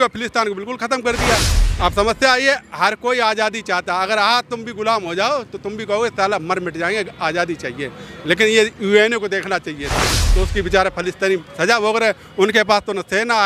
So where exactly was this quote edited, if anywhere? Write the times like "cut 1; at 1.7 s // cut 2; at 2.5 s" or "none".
cut 1; at 1.6 s